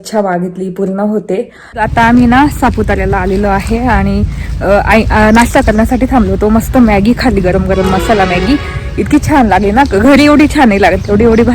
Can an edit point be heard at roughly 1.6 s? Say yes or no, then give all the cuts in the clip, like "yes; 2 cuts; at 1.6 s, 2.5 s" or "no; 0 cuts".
yes; 1 cut; at 1.6 s